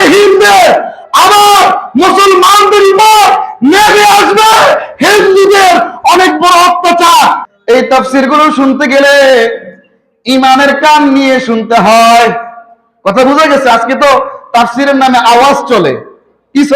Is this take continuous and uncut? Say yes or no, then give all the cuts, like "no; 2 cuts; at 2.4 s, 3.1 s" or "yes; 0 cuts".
no; 1 cut; at 7.5 s